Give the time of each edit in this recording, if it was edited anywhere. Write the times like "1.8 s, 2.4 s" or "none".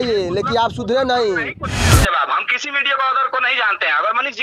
1.9 s